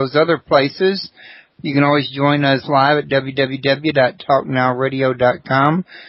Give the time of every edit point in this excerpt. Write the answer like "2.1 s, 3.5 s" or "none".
4.8 s

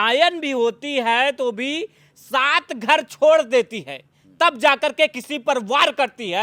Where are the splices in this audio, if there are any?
none

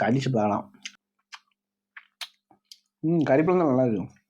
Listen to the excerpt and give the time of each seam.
1.0 s

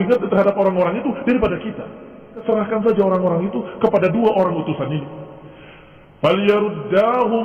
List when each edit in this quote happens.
2.4 s

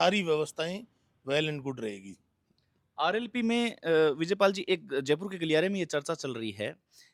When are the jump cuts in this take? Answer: none

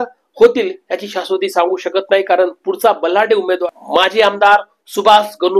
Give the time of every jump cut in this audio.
3.6 s

